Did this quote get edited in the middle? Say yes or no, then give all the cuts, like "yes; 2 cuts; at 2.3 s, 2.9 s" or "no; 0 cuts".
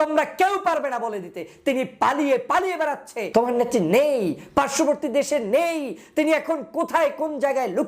yes; 1 cut; at 3.1 s